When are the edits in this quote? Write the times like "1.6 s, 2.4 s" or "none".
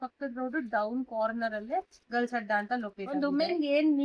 3.0 s